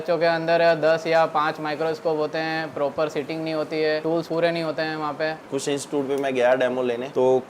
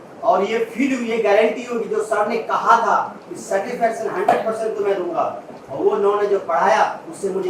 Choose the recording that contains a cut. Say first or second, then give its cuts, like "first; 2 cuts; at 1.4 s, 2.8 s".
first; 1 cut; at 5.4 s